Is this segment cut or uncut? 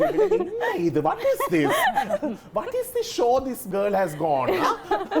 cut